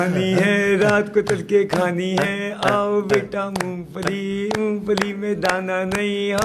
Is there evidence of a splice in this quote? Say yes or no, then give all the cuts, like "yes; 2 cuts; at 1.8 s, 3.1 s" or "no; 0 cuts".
no; 0 cuts